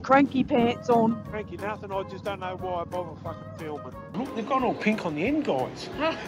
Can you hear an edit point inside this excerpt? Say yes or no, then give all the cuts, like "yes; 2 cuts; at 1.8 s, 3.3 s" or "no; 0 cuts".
yes; 2 cuts; at 1.3 s, 4.1 s